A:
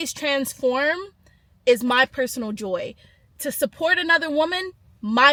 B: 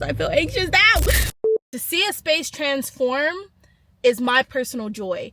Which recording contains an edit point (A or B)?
B